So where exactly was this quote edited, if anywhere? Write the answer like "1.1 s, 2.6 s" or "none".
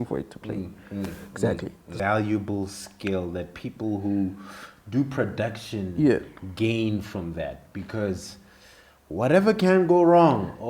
1.8 s